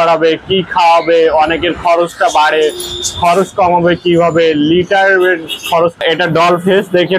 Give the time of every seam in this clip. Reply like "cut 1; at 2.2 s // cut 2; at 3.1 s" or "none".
cut 1; at 6.0 s